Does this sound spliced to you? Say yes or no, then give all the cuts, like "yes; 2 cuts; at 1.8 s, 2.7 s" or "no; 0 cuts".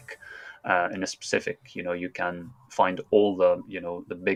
no; 0 cuts